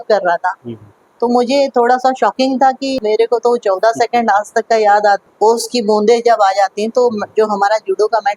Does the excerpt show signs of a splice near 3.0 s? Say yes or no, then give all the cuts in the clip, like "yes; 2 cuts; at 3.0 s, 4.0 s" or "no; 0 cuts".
yes; 2 cuts; at 3.0 s, 5.2 s